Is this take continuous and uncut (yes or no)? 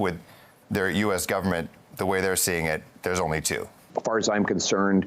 no